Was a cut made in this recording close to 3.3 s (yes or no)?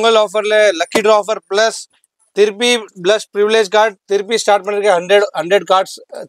no